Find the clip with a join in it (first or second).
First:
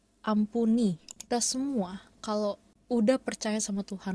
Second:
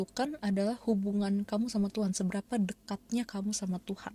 first